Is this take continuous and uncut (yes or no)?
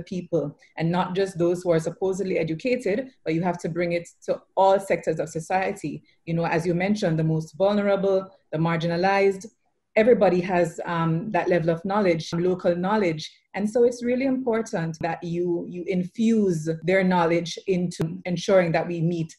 no